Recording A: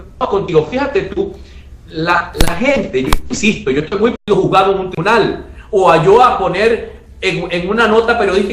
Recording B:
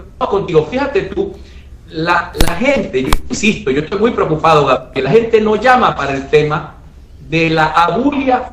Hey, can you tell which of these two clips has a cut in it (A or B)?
B